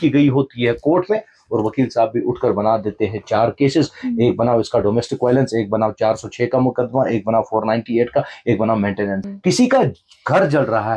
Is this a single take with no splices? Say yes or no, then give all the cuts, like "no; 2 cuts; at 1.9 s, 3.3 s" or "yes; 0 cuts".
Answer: no; 1 cut; at 9.3 s